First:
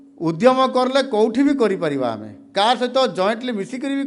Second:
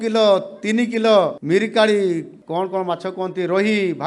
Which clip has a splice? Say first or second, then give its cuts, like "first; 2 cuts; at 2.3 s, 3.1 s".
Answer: second; 2 cuts; at 1.4 s, 2.4 s